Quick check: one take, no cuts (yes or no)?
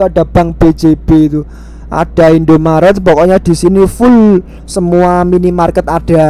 yes